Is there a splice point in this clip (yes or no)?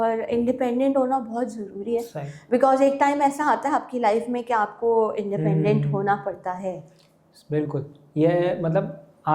no